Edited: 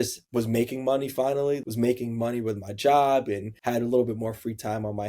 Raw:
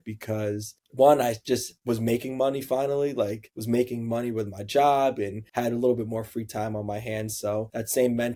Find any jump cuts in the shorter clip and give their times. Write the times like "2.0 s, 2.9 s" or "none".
1.6 s